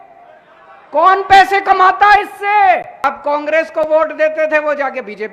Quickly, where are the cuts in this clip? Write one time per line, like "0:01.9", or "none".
0:03.0